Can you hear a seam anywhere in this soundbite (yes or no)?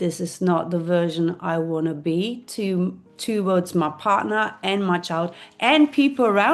no